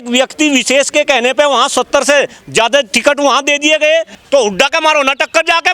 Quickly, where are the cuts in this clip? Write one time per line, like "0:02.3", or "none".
0:04.2